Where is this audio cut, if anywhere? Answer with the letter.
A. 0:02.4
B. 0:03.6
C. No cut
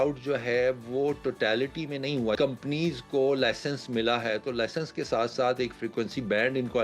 A